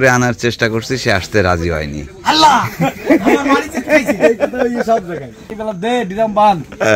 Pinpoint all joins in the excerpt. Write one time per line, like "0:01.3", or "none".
0:05.5